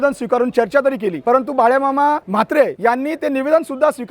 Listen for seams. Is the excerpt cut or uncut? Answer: cut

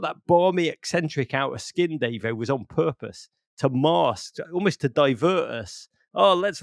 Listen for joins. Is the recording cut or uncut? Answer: uncut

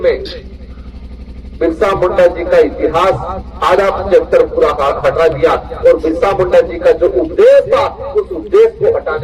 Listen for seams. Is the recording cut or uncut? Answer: uncut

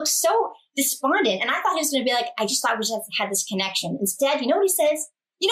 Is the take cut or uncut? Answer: uncut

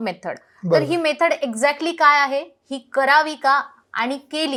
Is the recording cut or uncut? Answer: uncut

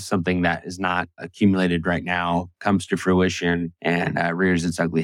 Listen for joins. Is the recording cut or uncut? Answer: cut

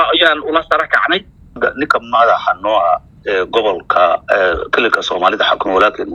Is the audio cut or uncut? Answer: cut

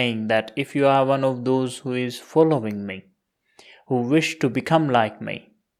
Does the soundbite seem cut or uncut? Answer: uncut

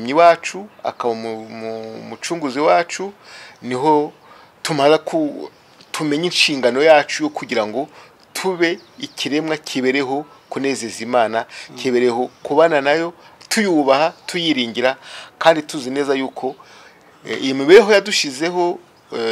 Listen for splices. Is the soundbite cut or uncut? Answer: uncut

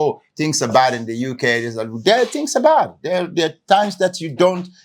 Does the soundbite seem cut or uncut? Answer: uncut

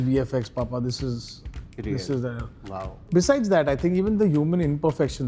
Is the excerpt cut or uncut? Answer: cut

